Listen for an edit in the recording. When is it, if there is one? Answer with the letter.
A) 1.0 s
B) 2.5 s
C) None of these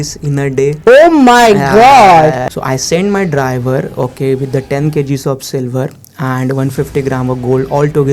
B